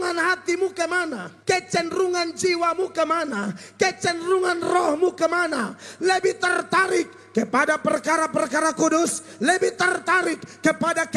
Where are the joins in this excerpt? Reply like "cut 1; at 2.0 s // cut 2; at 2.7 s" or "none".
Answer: cut 1; at 1.3 s